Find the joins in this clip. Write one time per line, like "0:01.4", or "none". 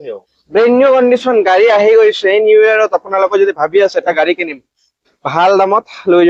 none